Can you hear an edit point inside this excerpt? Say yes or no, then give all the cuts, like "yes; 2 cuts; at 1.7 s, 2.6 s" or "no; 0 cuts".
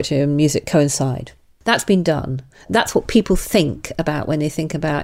yes; 1 cut; at 1.5 s